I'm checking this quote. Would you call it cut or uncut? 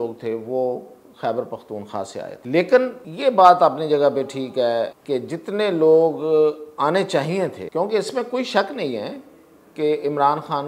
cut